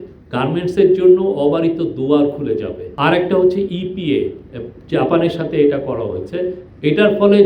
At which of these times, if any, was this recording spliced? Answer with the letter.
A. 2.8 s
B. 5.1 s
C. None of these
A